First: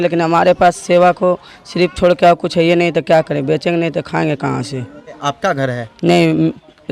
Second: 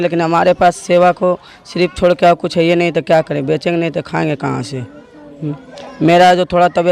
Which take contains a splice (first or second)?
first